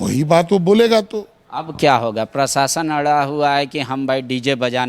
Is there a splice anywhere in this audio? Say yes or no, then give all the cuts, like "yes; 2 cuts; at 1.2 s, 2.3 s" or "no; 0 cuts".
no; 0 cuts